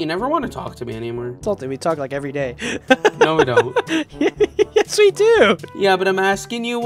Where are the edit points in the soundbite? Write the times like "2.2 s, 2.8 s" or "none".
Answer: 1.4 s, 4.0 s, 5.7 s